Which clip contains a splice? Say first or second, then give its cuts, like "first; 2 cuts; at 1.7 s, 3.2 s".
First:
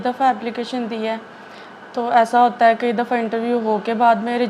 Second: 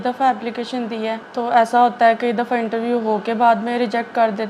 second; 1 cut; at 1.2 s